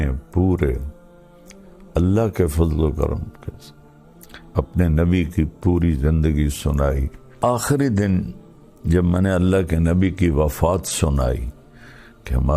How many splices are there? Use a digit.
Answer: 1